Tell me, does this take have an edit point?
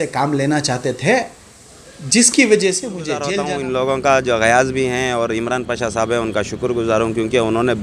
yes; 1 cut; at 3.3 s

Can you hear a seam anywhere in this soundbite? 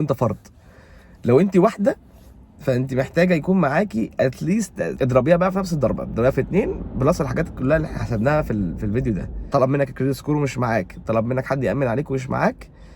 yes; 2 cuts; at 4.9 s, 9.4 s

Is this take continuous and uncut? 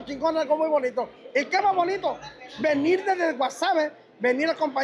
yes; 0 cuts

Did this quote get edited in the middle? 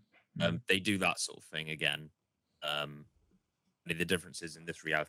no; 0 cuts

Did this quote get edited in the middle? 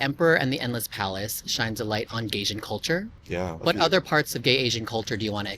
yes; 1 cut; at 3.5 s

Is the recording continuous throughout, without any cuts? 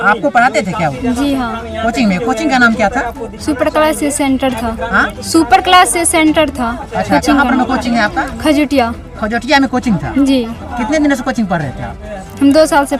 yes; 0 cuts

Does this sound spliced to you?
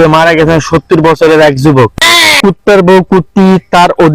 yes; 1 cut; at 2.4 s

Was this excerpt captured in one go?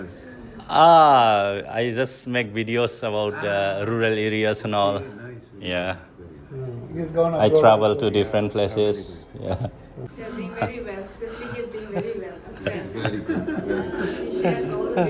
no; 1 cut; at 10.1 s

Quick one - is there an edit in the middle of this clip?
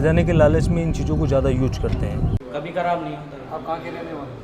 yes; 1 cut; at 2.3 s

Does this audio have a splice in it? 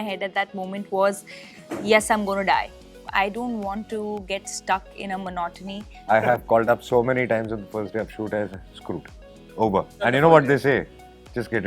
yes; 3 cuts; at 3.0 s, 6.0 s, 10.1 s

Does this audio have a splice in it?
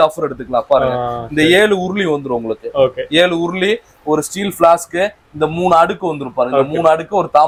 no; 0 cuts

